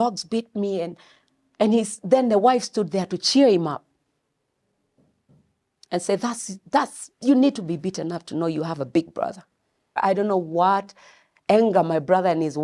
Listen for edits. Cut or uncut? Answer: cut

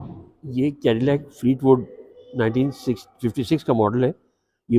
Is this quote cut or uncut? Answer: uncut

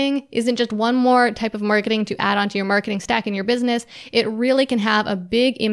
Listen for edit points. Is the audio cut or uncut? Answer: uncut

